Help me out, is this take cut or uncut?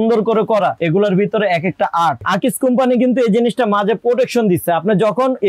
cut